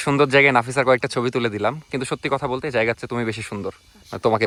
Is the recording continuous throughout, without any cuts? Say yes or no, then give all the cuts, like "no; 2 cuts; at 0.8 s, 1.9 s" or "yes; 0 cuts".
yes; 0 cuts